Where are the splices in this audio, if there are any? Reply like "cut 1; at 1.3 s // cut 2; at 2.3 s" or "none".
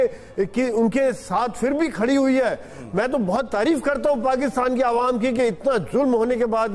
none